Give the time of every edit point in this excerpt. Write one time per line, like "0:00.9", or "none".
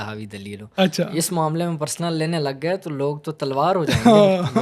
none